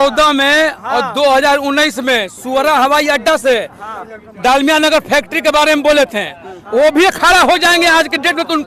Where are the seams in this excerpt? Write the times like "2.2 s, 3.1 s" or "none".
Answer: none